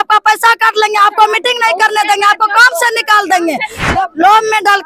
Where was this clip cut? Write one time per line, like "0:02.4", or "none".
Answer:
0:03.8